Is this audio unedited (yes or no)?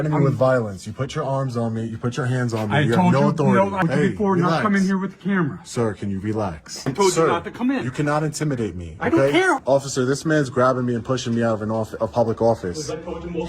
no